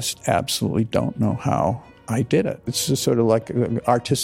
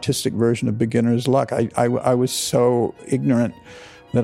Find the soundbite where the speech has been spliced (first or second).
first